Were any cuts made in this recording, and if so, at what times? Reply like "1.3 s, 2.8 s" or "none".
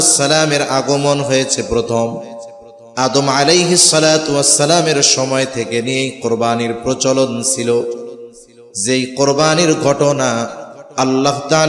none